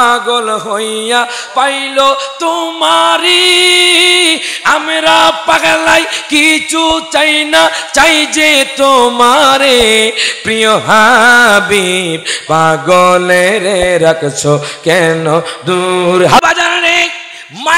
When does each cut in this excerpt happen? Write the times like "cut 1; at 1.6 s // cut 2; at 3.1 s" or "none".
cut 1; at 16.4 s

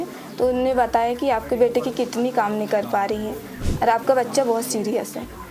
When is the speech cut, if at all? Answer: cut 1; at 3.6 s

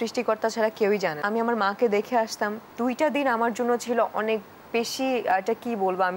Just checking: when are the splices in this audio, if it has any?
cut 1; at 1.2 s // cut 2; at 2.6 s

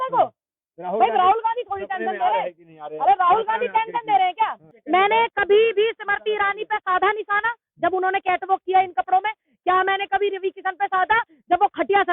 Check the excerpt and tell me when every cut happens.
cut 1; at 4.7 s

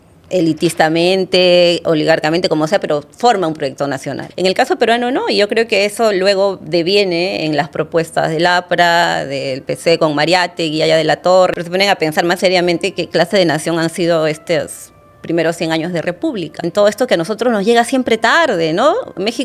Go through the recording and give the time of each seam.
cut 1; at 4.2 s // cut 2; at 11.6 s // cut 3; at 16.7 s

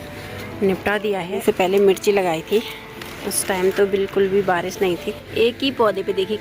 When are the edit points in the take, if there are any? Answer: cut 1; at 1.4 s // cut 2; at 5.2 s

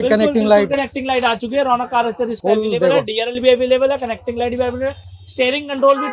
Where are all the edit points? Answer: none

